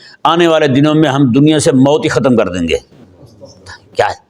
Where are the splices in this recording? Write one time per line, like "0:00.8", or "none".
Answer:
none